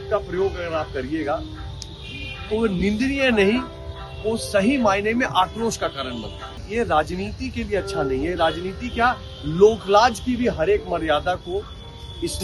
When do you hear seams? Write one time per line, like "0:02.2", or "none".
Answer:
0:06.6